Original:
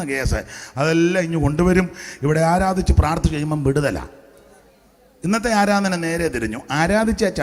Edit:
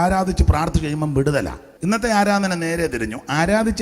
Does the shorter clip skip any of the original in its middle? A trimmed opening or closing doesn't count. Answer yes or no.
yes